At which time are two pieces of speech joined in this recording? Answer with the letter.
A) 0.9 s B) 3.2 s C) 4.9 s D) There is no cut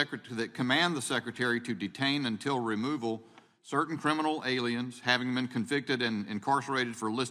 B